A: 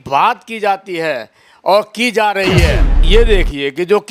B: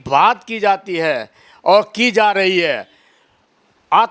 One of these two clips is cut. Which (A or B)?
A